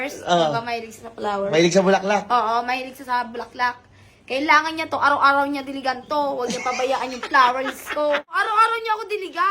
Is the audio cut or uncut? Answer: cut